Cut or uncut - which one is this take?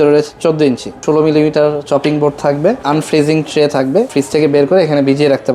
cut